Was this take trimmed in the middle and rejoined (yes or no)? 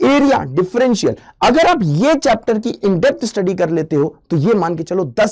no